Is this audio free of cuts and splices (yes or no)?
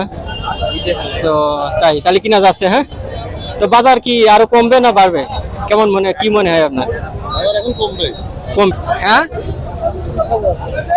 no